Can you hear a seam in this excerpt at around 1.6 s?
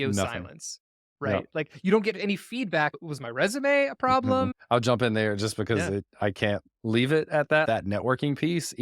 no; 3 cuts; at 2.9 s, 4.6 s, 7.7 s

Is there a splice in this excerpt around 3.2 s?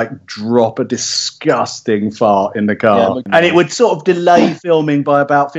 yes; 1 cut; at 3.2 s

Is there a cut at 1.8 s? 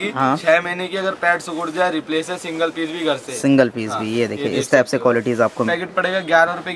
no; 1 cut; at 5.7 s

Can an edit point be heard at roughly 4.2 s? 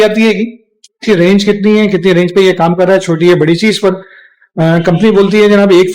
no; 1 cut; at 1.0 s

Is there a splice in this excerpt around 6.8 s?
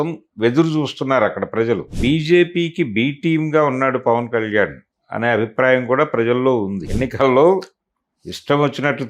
yes; 2 cuts; at 1.9 s, 6.8 s

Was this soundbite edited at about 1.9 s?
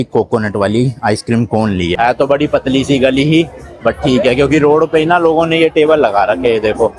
yes; 1 cut; at 1.9 s

